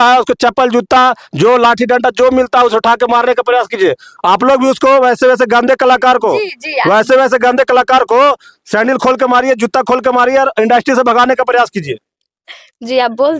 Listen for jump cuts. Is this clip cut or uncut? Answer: uncut